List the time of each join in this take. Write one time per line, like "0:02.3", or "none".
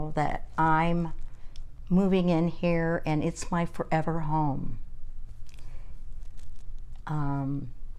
none